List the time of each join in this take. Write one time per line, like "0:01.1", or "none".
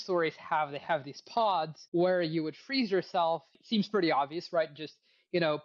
0:01.8
0:03.6